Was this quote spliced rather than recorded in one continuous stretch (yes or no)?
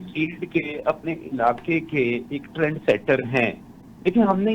no